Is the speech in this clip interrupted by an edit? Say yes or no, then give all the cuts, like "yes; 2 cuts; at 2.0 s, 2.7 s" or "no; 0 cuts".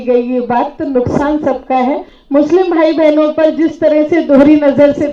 yes; 1 cut; at 2.1 s